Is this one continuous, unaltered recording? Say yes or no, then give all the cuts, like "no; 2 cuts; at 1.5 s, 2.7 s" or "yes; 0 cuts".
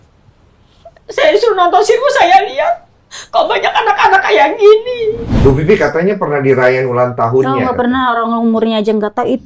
no; 1 cut; at 5.3 s